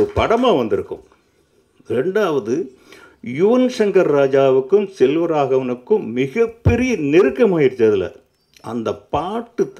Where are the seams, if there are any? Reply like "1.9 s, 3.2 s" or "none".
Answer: none